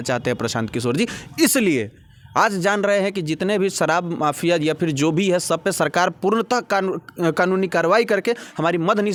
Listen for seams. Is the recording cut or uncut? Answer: uncut